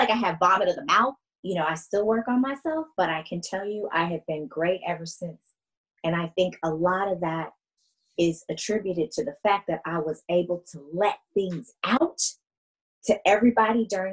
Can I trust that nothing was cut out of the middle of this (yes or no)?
no